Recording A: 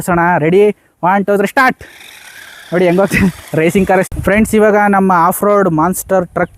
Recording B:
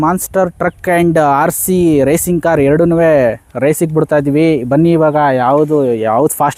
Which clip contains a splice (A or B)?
A